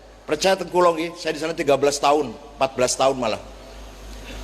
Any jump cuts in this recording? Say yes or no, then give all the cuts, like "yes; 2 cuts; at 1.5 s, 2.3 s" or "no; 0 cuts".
no; 0 cuts